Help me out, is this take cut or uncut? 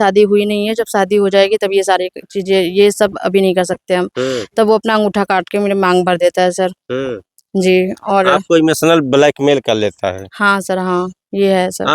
uncut